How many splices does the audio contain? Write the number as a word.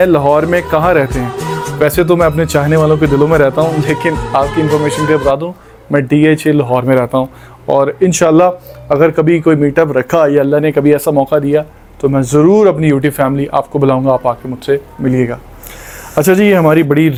zero